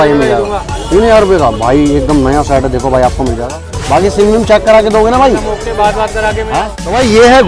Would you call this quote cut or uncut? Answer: cut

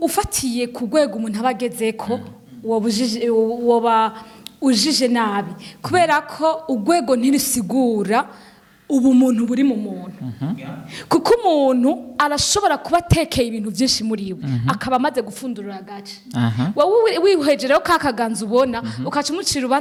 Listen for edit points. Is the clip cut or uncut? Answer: uncut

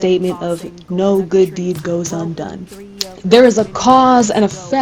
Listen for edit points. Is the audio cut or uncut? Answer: cut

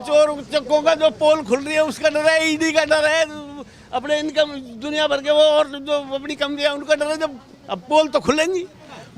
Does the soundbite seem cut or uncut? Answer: uncut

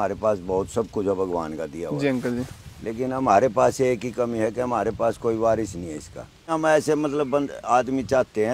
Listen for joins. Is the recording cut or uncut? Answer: cut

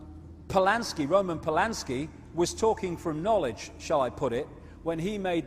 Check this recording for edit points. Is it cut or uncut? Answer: cut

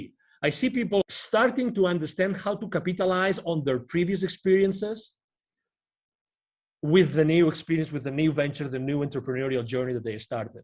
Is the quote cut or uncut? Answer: cut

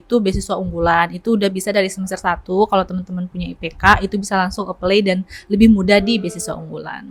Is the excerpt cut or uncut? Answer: uncut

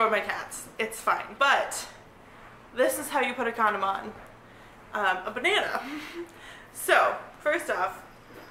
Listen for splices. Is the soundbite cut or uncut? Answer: cut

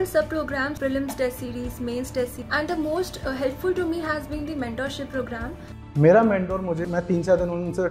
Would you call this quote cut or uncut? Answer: cut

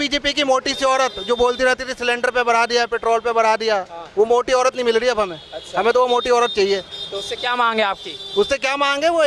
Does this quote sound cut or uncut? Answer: uncut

